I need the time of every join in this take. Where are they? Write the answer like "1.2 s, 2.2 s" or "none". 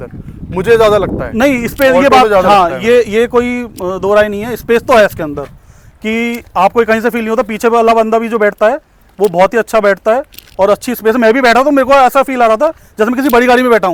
none